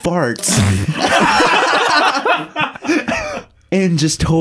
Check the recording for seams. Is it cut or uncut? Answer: uncut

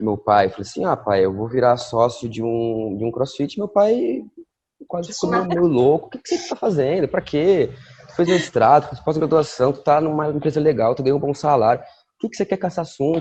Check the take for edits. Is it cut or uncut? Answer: uncut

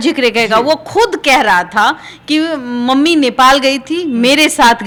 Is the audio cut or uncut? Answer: uncut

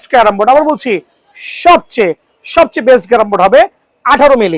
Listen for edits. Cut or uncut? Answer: uncut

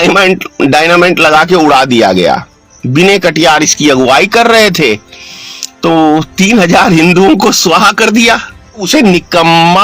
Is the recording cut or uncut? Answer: cut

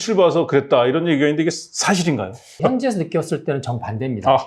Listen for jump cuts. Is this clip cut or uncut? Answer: cut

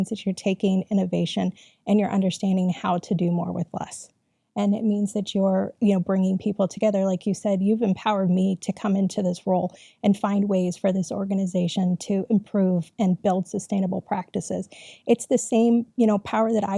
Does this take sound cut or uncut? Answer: uncut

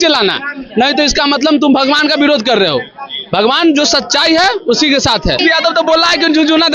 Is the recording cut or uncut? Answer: cut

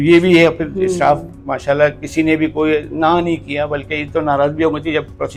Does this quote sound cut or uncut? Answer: uncut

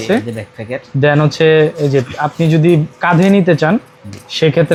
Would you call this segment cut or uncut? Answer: uncut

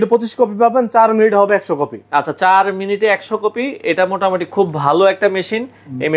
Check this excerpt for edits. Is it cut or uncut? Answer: uncut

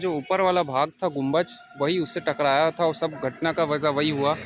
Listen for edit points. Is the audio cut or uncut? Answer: uncut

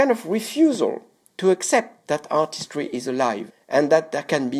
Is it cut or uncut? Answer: uncut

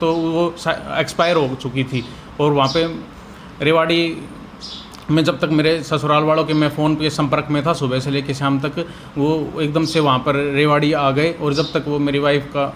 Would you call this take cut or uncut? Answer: uncut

